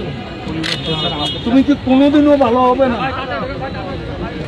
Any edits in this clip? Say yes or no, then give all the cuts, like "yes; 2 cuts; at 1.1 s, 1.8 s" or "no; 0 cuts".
no; 0 cuts